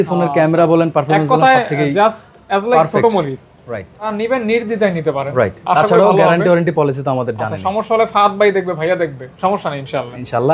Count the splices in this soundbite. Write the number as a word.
one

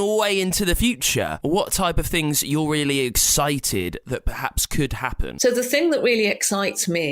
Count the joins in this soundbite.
two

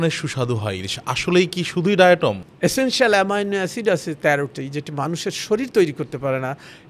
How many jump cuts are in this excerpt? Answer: one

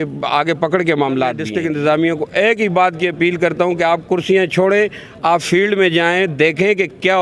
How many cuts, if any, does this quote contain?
one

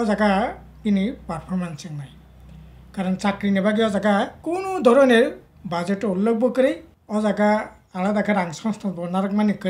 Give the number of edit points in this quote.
two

